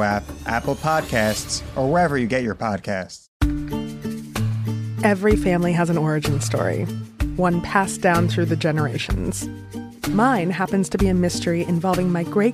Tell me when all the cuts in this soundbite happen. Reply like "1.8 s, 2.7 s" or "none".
3.3 s